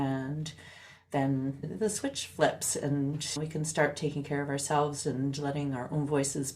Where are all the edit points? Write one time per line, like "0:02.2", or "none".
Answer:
0:01.7
0:03.4